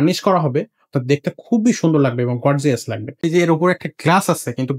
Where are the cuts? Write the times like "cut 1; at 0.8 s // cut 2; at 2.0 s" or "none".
cut 1; at 3.2 s